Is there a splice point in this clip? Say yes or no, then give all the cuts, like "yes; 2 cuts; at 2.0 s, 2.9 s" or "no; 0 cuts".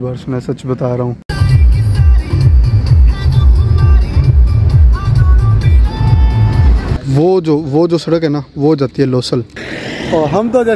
yes; 3 cuts; at 1.2 s, 6.9 s, 9.5 s